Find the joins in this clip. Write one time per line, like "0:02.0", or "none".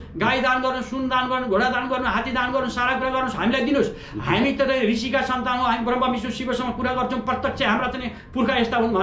none

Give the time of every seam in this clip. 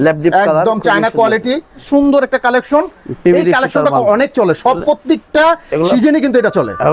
0:01.8

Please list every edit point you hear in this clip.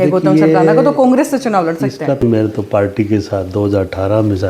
0:02.2

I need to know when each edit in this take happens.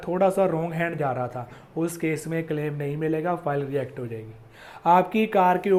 none

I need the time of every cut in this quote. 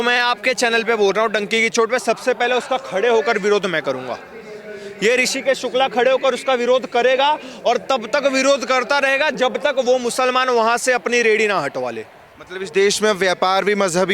none

